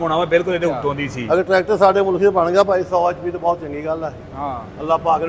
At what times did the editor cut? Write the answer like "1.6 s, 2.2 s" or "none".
1.1 s